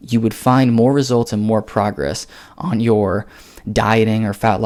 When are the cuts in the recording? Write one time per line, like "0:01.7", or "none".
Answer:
none

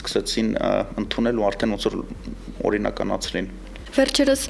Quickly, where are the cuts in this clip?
none

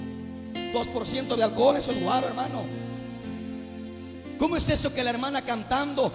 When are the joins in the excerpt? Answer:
0:04.1

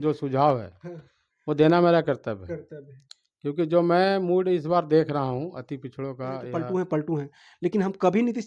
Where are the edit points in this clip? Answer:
0:06.5

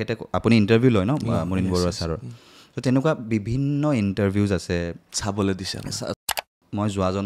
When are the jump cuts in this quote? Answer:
0:06.2

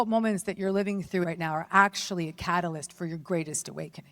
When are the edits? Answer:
0:01.2

